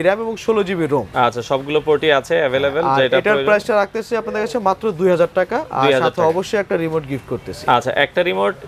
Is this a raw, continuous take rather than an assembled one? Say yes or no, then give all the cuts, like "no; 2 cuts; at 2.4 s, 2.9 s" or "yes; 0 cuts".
yes; 0 cuts